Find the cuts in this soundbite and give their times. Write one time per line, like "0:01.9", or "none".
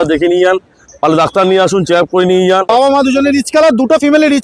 0:02.7

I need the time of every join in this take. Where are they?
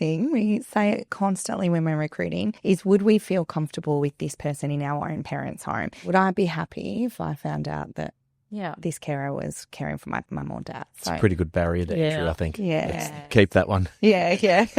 0:02.6
0:06.0
0:10.3

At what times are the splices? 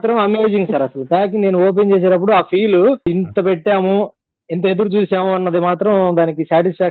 none

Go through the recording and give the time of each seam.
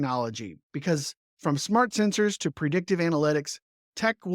0:01.2

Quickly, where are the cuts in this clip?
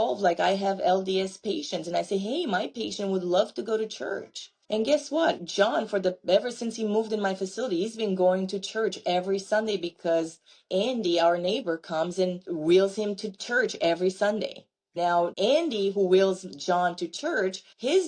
0:14.9

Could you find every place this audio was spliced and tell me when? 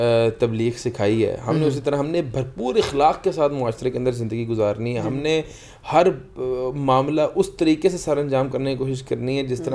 none

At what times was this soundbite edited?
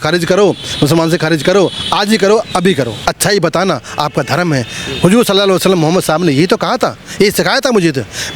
0:02.9

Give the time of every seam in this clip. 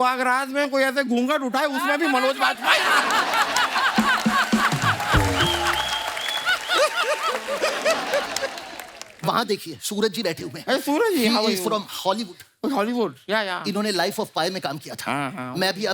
none

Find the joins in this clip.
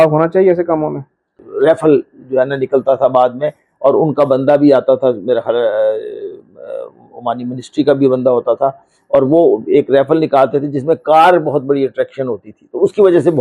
0:01.4

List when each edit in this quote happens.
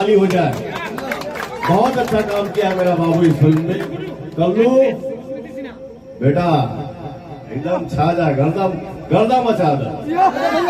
none

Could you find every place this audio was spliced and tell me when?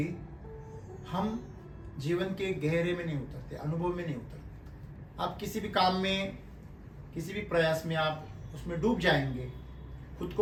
none

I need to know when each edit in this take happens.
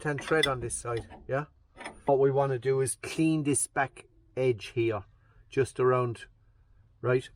0:02.1

